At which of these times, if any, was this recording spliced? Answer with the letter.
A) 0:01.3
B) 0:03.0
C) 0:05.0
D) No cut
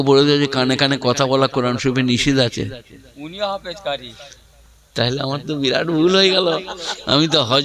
D